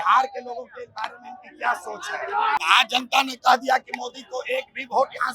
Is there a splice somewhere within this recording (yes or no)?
yes